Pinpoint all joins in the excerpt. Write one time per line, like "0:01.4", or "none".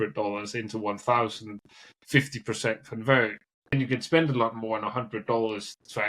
0:03.7